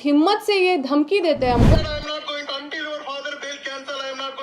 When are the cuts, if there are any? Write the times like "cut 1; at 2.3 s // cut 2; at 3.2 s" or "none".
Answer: cut 1; at 1.8 s